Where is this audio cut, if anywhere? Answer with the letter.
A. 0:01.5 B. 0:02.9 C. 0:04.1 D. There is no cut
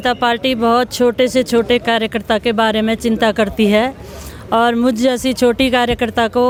D